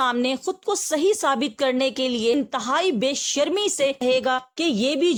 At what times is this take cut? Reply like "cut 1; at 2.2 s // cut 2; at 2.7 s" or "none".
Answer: none